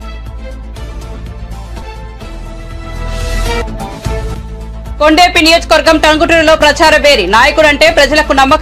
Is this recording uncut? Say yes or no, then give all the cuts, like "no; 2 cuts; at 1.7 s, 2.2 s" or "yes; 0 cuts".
no; 1 cut; at 0.9 s